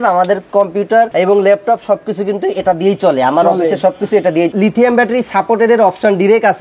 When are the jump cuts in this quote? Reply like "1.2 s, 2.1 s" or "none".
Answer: 1.1 s, 4.5 s